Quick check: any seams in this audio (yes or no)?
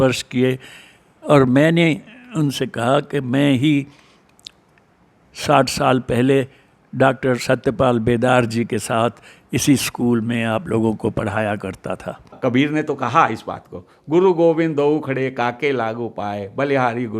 yes